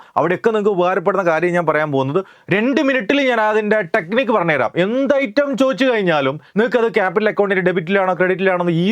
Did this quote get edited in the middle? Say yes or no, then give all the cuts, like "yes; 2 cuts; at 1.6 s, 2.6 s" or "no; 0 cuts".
yes; 2 cuts; at 2.3 s, 6.4 s